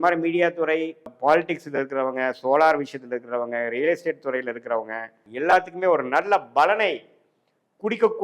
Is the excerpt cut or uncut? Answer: cut